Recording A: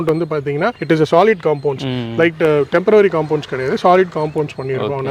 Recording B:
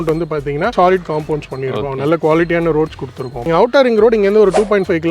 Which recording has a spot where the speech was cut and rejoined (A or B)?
B